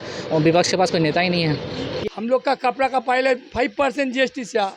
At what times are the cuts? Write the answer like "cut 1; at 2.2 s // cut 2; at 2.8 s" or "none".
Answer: cut 1; at 2.0 s